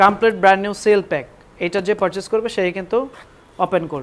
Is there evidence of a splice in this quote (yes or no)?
no